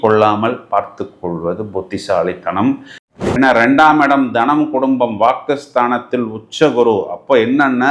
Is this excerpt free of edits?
no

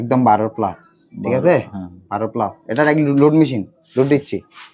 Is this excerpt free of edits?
yes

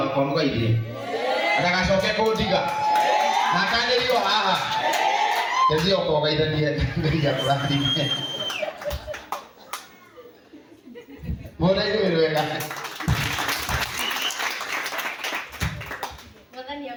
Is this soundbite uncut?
yes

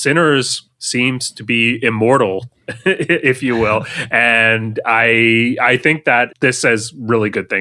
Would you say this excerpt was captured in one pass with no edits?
no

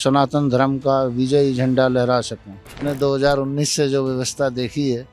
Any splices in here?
yes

